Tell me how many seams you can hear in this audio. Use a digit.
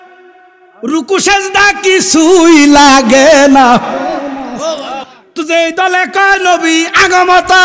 1